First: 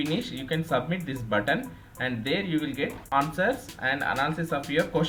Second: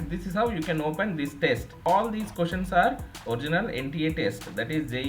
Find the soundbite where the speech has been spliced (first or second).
second